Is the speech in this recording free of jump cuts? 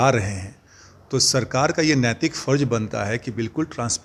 yes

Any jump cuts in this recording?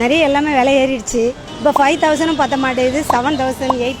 yes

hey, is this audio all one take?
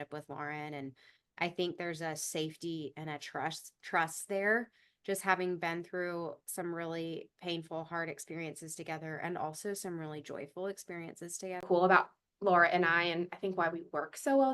no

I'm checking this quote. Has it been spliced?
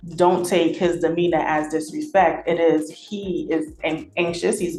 no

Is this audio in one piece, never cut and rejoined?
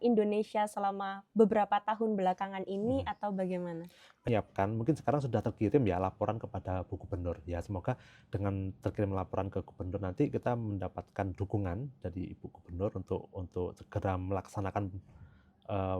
no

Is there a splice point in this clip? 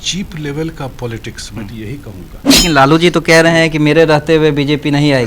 yes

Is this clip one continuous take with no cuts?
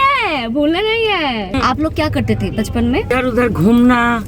no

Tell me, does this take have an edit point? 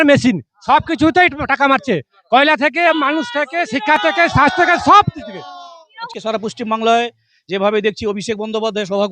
yes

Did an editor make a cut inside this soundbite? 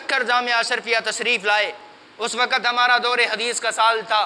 no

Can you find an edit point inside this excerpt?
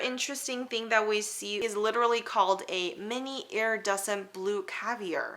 no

